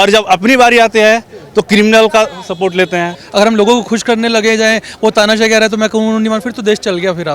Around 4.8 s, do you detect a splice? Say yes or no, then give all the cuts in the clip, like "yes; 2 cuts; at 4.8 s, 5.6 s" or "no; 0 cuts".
no; 1 cut; at 3.2 s